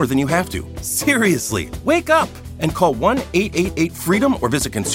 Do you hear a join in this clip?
no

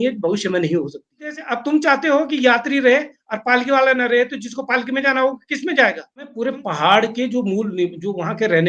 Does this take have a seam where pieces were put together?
yes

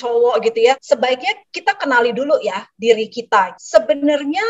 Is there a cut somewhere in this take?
yes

